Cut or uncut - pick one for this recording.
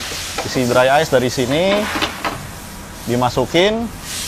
uncut